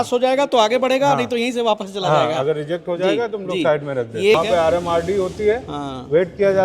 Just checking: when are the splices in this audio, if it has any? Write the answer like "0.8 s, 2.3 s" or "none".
4.3 s